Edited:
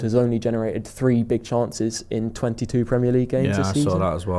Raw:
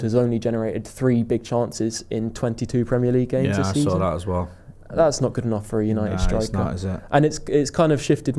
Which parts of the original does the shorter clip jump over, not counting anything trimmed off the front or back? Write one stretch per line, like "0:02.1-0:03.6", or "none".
none